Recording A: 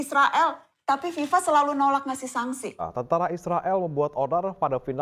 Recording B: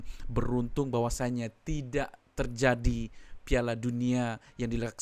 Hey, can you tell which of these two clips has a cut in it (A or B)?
A